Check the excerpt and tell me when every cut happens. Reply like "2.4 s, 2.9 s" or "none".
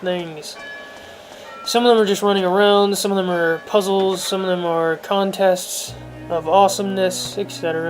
3.0 s